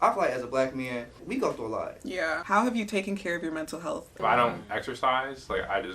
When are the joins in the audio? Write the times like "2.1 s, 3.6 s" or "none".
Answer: 1.2 s, 2.4 s, 4.2 s